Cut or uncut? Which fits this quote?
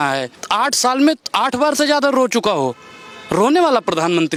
uncut